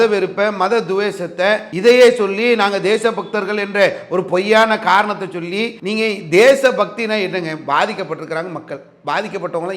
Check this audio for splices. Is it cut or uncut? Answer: cut